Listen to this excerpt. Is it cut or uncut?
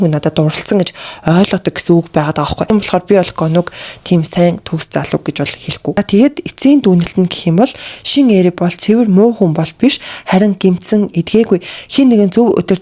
cut